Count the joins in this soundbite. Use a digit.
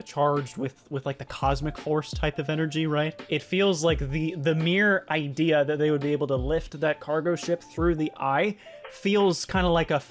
1